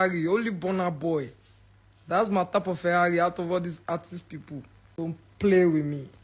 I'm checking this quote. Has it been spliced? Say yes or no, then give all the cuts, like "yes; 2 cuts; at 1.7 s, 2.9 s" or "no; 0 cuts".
yes; 1 cut; at 4.8 s